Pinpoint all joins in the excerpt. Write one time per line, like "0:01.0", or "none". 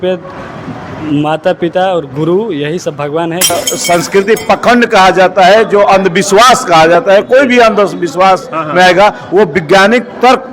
0:03.5